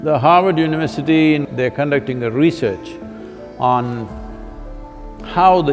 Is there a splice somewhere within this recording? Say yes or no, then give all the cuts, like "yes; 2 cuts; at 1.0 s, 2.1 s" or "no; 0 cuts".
yes; 1 cut; at 1.5 s